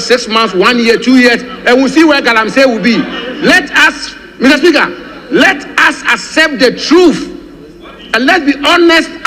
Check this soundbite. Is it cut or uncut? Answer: uncut